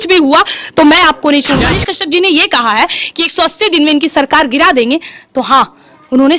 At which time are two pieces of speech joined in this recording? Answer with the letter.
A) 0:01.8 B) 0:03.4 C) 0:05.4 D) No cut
A